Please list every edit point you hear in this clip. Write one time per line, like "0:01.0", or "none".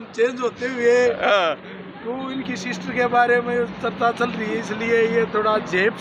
none

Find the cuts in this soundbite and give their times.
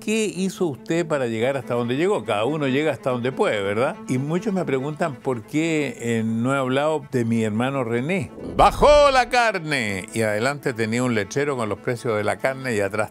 0:04.0
0:07.1
0:08.4

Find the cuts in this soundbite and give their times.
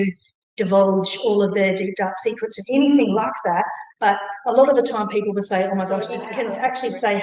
0:06.2

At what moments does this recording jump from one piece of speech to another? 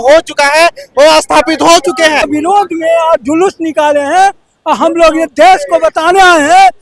0:02.3

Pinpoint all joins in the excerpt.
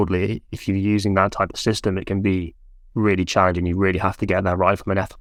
none

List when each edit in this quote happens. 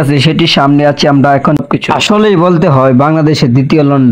0:01.6

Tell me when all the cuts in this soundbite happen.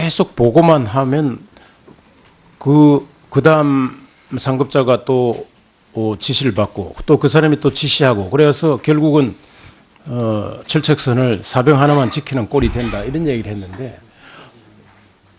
0:05.0

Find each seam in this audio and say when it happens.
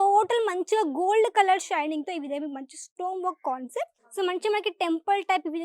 0:04.0

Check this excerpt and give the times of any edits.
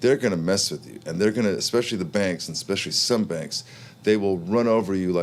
none

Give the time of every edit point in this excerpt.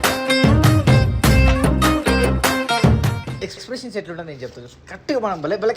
0:03.4

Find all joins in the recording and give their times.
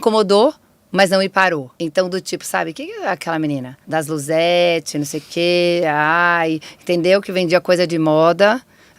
0:01.7
0:03.8

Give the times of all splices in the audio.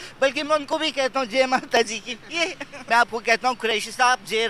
0:02.8

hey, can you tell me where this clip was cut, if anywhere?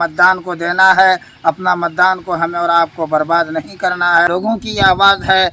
0:04.3

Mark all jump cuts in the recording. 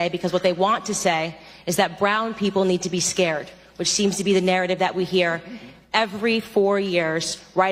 none

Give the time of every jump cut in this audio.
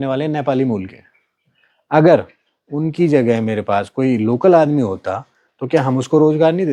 none

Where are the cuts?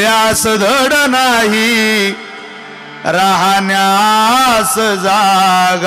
none

